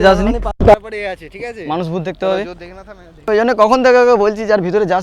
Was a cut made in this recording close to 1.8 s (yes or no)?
no